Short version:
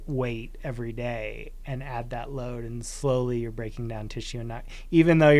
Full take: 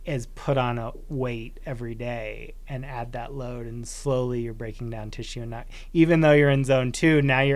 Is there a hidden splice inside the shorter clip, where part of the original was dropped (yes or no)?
no